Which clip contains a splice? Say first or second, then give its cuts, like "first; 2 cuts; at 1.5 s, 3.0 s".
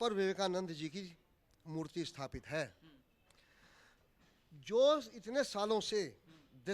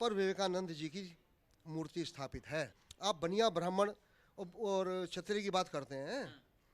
second; 1 cut; at 2.8 s